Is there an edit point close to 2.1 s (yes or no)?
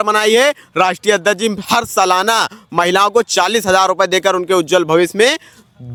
no